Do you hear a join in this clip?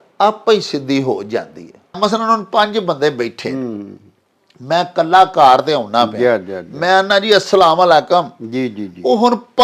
yes; 1 cut; at 2.0 s

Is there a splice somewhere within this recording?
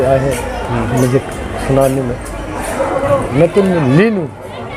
no; 0 cuts

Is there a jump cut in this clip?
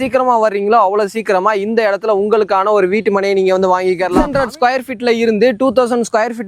yes; 1 cut; at 4.2 s

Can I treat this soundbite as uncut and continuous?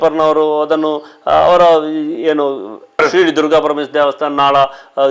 yes; 0 cuts

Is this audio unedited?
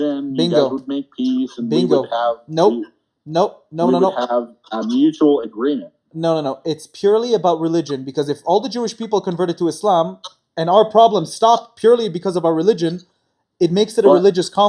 yes; 0 cuts

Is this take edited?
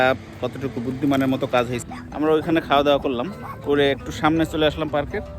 yes; 1 cut; at 1.8 s

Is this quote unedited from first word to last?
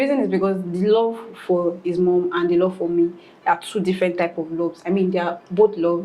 yes; 0 cuts

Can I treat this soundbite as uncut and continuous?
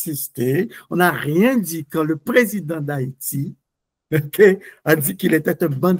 yes; 0 cuts

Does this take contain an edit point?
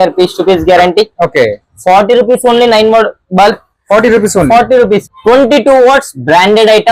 yes; 1 cut; at 5.1 s

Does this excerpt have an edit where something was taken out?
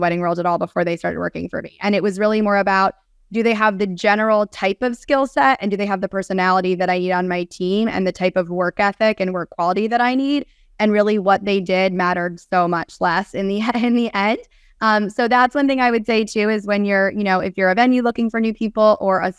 no; 0 cuts

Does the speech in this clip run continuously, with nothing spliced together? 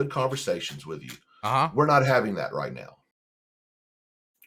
yes; 0 cuts

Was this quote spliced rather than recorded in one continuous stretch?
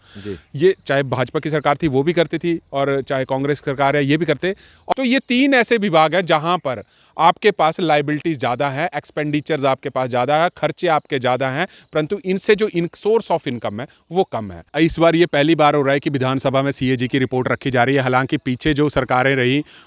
yes; 2 cuts; at 4.7 s, 14.7 s

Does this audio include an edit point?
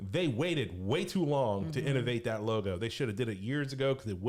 no; 0 cuts

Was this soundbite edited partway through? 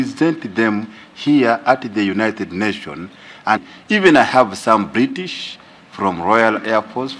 yes; 1 cut; at 3.6 s

